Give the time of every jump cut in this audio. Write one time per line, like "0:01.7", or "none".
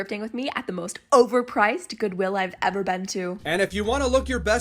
0:03.4